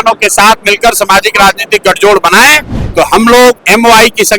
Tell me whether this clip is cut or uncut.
cut